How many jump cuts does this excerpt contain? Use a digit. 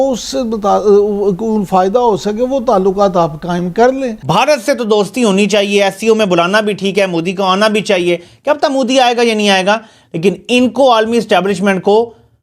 1